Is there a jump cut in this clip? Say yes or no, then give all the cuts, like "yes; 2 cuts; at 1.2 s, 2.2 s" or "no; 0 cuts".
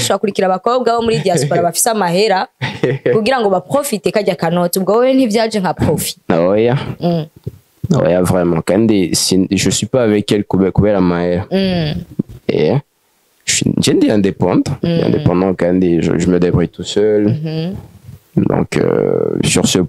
no; 0 cuts